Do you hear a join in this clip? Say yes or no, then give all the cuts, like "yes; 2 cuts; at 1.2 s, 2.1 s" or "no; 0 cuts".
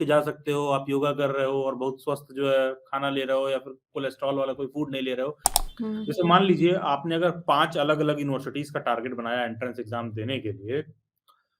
yes; 1 cut; at 5.5 s